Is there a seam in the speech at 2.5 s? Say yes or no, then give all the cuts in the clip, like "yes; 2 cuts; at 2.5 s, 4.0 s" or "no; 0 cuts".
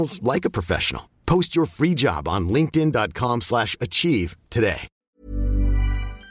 no; 1 cut; at 5.2 s